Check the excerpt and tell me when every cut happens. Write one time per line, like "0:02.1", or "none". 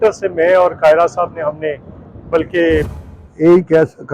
0:03.0